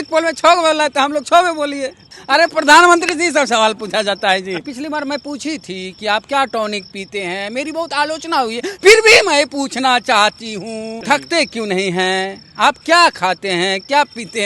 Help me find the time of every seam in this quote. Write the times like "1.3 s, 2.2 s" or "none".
2.1 s, 4.7 s, 10.9 s